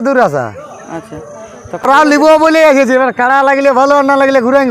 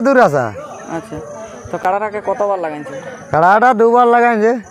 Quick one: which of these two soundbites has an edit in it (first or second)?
first